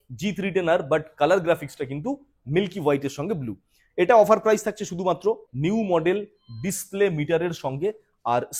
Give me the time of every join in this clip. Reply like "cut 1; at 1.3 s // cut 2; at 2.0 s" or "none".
cut 1; at 5.5 s